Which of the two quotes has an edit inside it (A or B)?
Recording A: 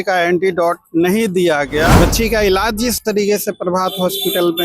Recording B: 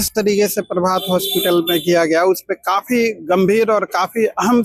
A